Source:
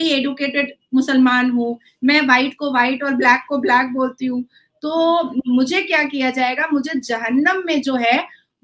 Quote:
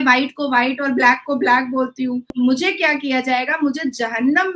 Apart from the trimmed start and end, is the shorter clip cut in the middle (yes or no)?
yes